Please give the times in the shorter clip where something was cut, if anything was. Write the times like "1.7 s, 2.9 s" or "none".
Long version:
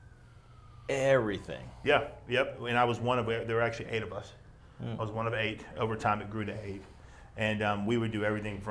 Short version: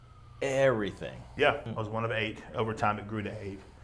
1.7 s